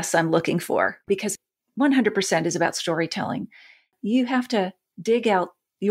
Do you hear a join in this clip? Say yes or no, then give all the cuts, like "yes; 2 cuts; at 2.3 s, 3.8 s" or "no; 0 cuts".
yes; 3 cuts; at 1.0 s, 3.9 s, 4.8 s